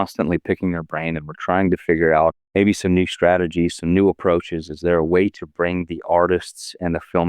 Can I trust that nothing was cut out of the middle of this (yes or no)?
no